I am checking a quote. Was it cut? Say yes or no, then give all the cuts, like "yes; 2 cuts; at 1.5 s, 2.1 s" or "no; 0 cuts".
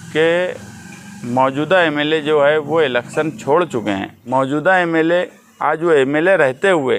yes; 1 cut; at 4.1 s